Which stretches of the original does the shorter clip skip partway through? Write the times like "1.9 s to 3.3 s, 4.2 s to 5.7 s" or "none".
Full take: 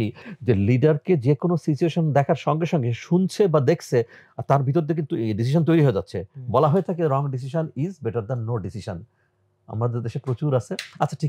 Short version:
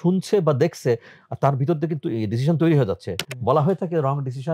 none